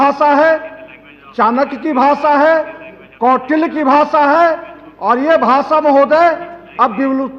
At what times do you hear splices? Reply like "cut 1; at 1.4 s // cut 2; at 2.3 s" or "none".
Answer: none